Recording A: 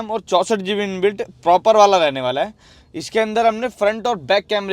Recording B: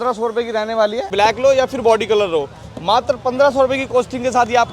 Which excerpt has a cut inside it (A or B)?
B